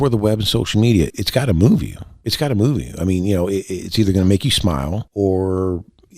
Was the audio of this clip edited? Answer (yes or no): yes